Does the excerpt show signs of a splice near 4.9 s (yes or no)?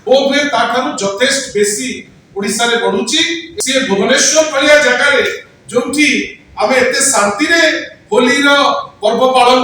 no